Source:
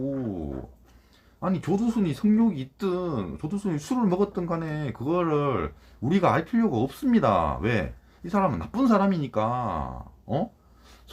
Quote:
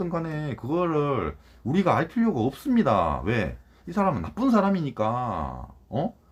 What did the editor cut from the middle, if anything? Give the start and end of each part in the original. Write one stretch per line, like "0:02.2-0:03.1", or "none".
none